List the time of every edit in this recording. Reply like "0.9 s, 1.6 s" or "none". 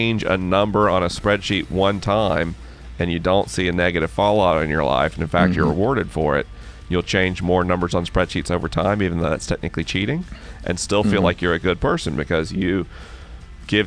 none